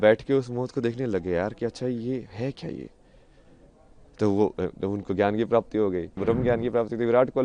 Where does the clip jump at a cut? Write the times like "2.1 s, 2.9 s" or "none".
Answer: 6.1 s